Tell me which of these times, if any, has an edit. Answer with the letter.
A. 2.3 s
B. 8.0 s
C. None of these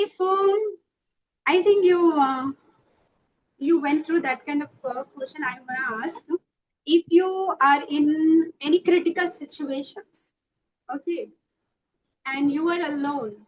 C